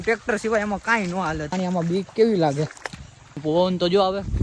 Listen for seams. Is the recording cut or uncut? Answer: cut